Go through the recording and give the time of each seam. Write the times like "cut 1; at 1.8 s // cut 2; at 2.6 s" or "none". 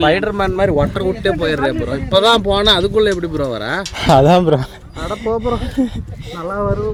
none